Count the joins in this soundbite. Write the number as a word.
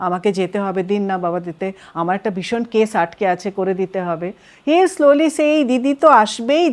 zero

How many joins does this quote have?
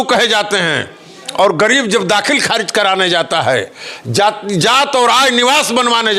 zero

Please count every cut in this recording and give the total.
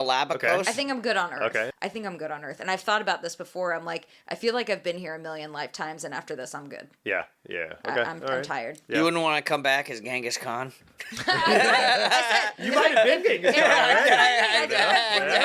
one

